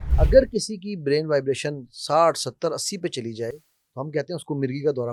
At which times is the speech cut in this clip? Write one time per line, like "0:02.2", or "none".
none